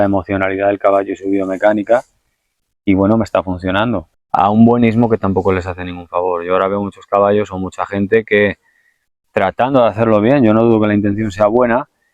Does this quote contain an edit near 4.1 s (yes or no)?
yes